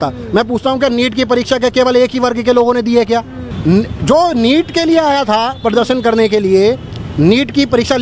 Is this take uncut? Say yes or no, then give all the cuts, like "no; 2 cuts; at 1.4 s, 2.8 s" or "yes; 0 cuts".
no; 1 cut; at 3.5 s